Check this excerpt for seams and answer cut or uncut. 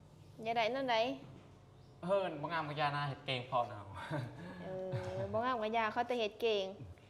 uncut